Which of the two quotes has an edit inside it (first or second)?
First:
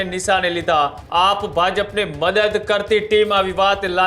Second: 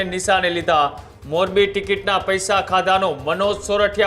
first